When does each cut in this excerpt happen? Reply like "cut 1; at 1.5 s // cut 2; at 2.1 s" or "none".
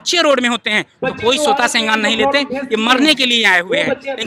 none